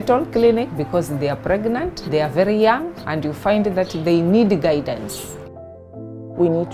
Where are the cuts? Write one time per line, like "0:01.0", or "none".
0:05.7